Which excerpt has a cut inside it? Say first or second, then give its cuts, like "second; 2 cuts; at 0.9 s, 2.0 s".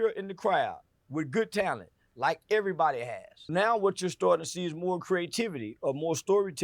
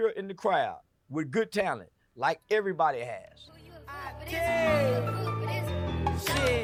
first; 1 cut; at 3.4 s